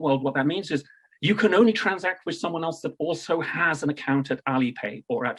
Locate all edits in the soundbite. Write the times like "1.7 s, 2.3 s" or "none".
none